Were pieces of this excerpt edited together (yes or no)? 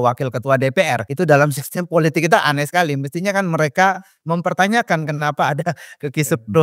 yes